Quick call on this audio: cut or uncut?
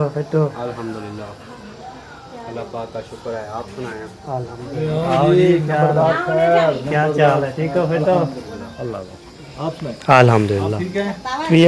uncut